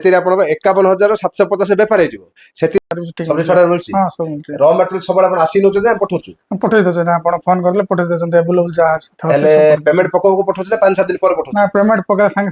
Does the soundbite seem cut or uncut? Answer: cut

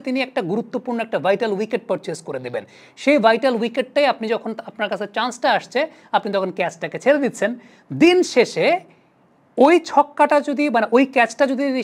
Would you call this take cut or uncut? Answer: uncut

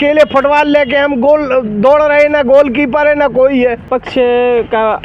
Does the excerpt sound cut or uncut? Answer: cut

